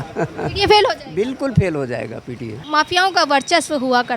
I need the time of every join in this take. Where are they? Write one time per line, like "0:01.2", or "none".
0:02.6